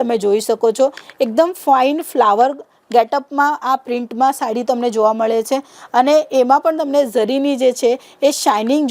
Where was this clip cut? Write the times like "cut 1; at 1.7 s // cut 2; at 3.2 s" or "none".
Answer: none